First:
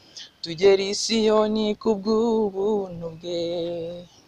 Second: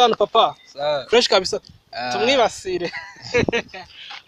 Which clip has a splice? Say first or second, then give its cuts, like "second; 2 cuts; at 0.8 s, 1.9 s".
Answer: second; 1 cut; at 1.6 s